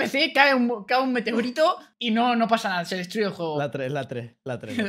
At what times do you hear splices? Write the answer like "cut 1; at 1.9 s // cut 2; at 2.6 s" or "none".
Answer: cut 1; at 1.9 s